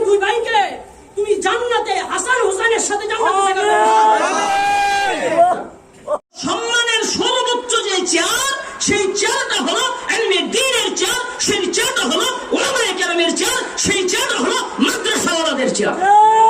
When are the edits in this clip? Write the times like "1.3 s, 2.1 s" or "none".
6.4 s